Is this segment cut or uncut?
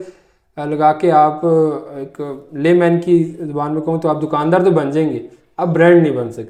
uncut